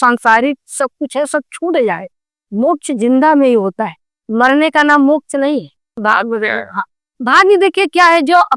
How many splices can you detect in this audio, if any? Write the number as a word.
one